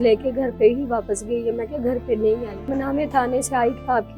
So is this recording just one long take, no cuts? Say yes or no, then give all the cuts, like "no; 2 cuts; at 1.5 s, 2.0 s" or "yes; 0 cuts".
no; 1 cut; at 2.8 s